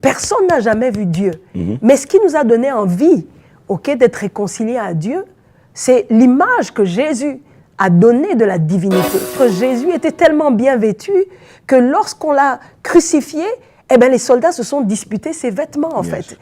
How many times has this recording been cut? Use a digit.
1